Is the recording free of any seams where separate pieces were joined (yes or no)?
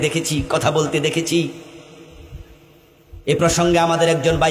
yes